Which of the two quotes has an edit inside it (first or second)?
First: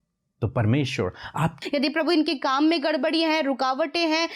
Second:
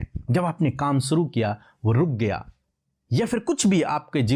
first